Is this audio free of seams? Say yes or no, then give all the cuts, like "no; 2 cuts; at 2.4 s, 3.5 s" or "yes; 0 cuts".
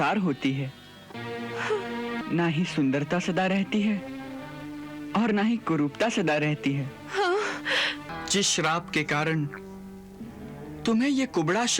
no; 2 cuts; at 2.2 s, 8.1 s